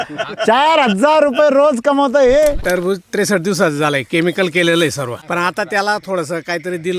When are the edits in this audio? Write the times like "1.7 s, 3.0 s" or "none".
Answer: 2.6 s, 5.1 s